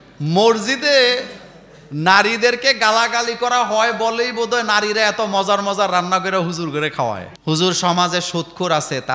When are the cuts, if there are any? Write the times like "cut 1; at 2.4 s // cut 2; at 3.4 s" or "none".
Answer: cut 1; at 7.3 s